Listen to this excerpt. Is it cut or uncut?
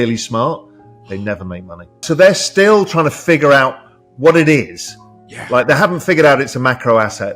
cut